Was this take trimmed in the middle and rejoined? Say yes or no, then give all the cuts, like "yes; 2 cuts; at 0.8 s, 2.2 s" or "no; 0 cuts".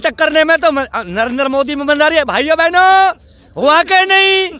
no; 0 cuts